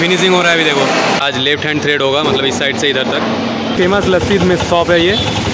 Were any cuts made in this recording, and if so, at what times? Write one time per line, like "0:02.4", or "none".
0:01.2
0:03.8